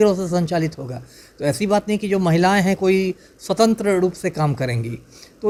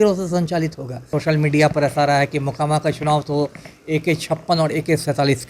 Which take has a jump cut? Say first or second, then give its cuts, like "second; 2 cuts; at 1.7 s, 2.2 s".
second; 1 cut; at 1.1 s